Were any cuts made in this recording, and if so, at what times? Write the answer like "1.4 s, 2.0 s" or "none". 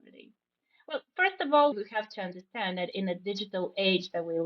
1.7 s